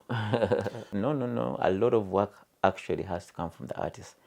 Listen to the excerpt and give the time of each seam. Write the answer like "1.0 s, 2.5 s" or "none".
0.9 s